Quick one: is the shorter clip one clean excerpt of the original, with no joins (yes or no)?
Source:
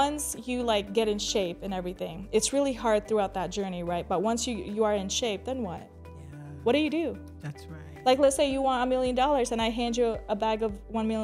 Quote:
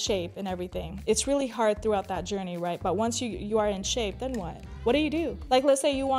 no